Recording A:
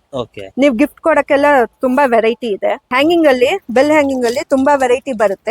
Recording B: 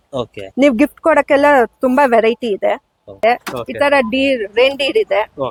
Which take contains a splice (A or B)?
A